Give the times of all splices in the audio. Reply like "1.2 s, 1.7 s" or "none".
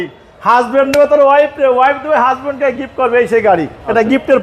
none

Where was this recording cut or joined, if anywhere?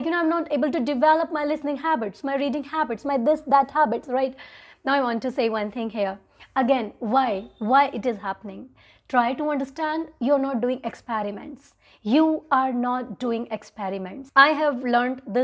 14.1 s

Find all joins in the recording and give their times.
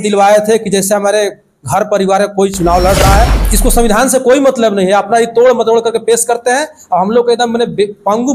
3.4 s

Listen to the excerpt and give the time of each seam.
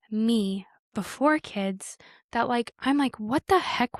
none

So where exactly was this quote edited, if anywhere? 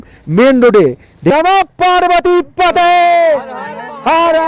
1.3 s

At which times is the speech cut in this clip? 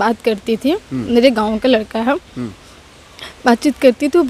none

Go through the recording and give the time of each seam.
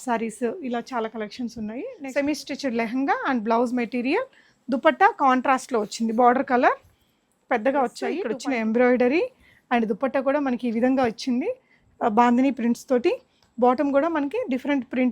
1.9 s, 8.3 s

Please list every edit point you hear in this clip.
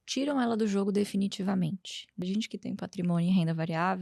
2.2 s

